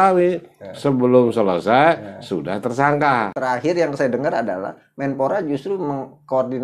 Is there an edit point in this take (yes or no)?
yes